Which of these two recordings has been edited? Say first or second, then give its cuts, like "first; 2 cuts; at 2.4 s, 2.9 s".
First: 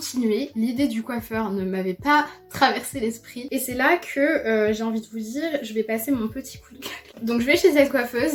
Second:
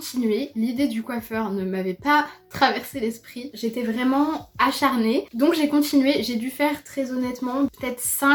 first; 2 cuts; at 3.5 s, 7.0 s